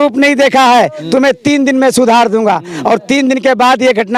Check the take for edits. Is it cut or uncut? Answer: uncut